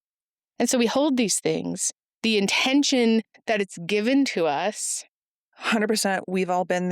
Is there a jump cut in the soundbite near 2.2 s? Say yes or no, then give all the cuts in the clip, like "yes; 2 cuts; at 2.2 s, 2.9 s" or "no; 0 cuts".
no; 1 cut; at 5.5 s